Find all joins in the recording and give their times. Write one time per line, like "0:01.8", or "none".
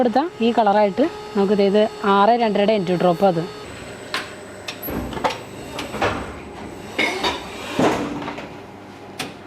none